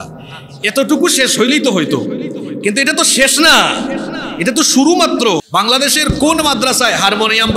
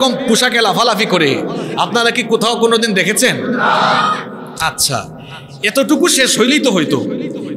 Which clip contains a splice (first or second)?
first